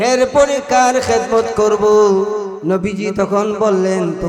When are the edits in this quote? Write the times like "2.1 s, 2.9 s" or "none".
2.5 s